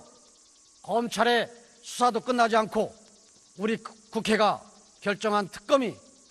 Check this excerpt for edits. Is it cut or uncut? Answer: cut